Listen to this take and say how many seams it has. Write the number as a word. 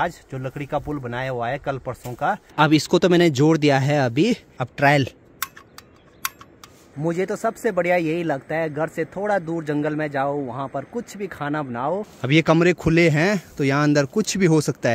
three